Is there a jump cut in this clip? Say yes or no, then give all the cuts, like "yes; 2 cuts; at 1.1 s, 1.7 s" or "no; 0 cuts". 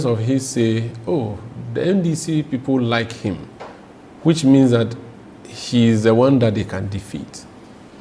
no; 0 cuts